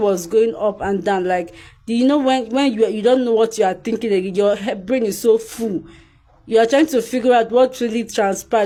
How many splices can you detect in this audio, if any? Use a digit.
0